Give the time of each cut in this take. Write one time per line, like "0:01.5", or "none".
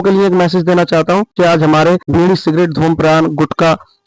0:01.3
0:02.0

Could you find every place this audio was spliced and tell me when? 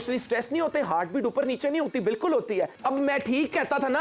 0:02.7

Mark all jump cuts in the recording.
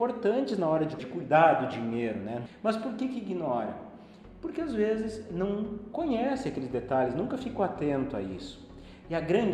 0:01.0
0:02.4

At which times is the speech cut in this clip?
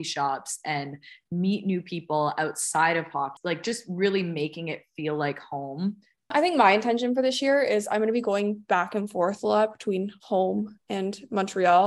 0:03.4
0:06.3

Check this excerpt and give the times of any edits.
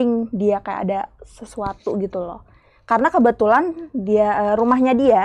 none

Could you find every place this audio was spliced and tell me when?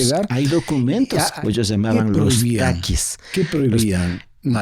0:01.3

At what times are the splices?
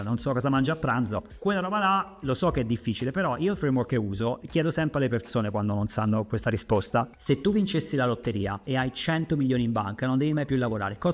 none

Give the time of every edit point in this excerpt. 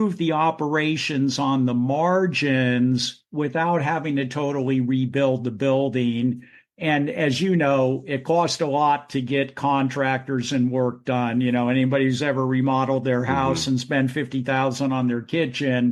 none

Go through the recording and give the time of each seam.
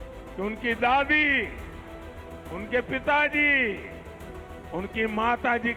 none

